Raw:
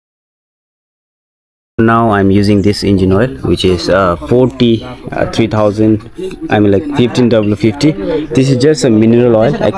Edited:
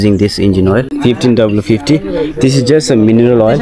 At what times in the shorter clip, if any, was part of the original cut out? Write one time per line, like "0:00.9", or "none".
0:00.9